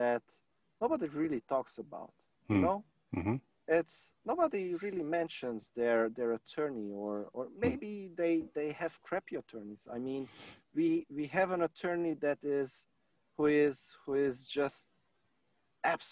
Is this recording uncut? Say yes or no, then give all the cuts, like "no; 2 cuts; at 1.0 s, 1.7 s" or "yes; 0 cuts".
yes; 0 cuts